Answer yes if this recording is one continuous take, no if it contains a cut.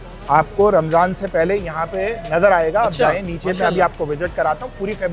yes